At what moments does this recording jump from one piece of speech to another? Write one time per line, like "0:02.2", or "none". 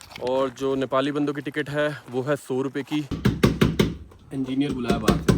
0:03.1